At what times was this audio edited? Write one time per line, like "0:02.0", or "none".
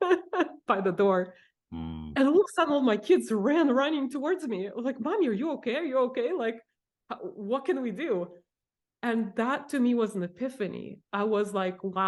none